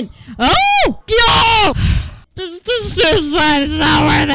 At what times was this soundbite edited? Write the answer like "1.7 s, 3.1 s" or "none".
1.0 s